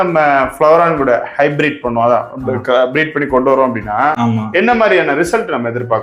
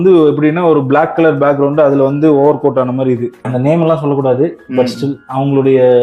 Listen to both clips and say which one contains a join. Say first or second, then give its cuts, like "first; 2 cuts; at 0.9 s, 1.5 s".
second; 1 cut; at 3.4 s